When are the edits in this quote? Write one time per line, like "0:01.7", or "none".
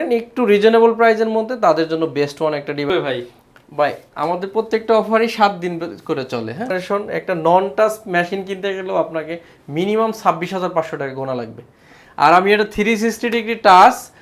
0:02.9
0:06.8